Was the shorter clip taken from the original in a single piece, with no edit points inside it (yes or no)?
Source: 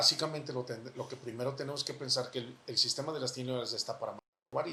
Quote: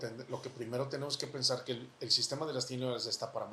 yes